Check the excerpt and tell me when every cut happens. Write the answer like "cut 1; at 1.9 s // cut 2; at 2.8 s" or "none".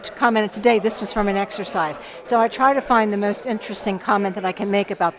none